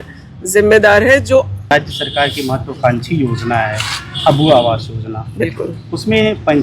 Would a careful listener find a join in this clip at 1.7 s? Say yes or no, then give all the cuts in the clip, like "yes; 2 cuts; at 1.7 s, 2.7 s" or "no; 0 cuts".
yes; 1 cut; at 1.7 s